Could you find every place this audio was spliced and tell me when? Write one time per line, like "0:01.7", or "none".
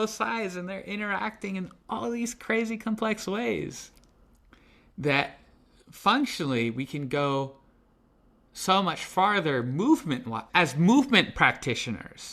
none